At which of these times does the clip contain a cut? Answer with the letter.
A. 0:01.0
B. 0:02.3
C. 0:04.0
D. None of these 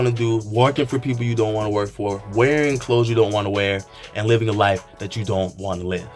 D